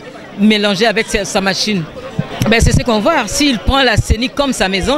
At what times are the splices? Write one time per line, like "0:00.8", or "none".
0:02.3